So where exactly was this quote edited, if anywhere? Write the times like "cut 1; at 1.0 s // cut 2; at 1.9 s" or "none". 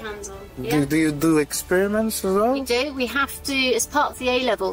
none